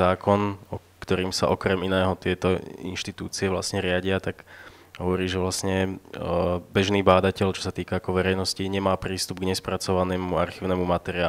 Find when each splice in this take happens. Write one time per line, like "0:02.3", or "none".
none